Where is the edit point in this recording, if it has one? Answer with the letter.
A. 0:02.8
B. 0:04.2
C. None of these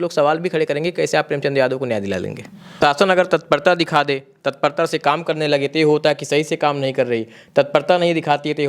A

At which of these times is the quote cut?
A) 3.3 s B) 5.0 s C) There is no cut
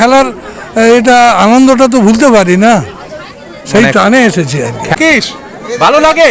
B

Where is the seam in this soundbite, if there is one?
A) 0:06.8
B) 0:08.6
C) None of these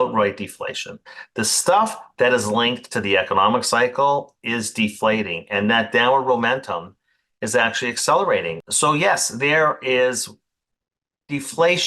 B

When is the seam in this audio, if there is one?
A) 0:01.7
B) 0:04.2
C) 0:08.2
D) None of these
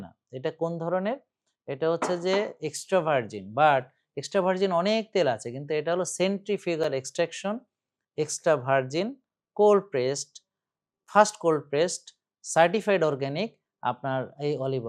D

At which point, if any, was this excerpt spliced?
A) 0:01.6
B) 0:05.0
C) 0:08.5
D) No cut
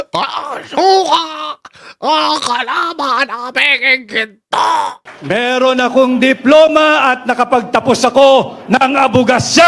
B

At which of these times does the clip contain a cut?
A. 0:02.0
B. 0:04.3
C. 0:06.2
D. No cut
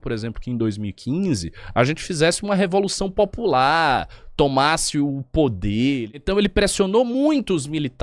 C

